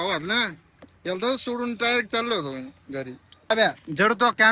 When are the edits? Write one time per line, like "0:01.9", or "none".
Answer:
0:03.5